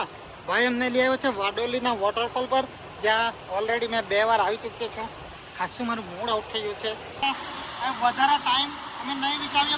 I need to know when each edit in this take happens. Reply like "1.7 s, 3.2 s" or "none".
7.2 s